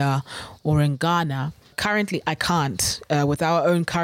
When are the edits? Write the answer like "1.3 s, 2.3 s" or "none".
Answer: 1.8 s

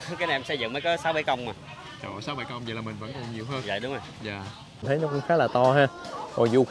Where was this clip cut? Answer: 4.8 s

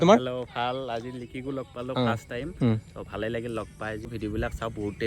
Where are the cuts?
4.1 s

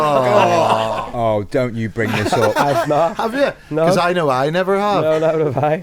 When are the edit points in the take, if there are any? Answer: 0.9 s

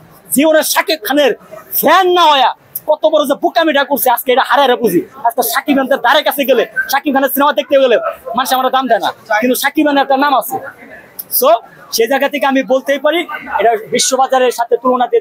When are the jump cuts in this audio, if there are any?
none

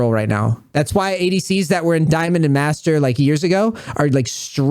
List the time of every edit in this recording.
2.1 s

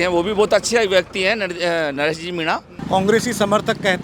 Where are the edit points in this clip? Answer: 2.7 s

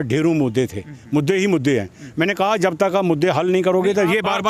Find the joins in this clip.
none

